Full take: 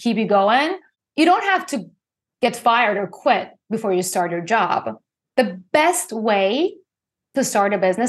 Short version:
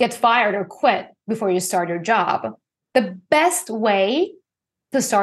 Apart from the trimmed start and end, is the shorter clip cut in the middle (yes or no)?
no